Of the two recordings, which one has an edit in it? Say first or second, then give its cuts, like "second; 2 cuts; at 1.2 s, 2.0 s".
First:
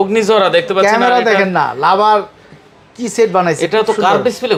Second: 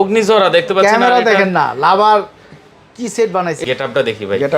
second; 1 cut; at 3.6 s